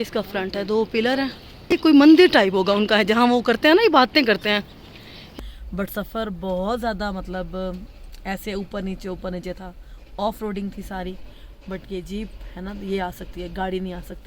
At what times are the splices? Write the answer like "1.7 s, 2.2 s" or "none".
1.8 s, 5.2 s